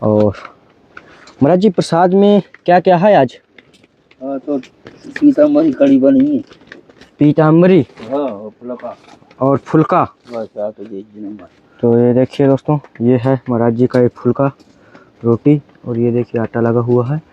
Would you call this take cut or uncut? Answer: uncut